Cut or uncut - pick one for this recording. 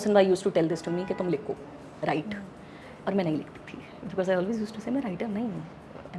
uncut